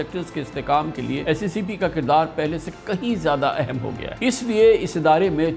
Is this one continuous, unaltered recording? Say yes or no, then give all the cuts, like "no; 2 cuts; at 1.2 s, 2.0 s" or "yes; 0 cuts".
no; 2 cuts; at 1.2 s, 4.0 s